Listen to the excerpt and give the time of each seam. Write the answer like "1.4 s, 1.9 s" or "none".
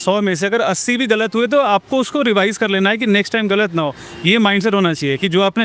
none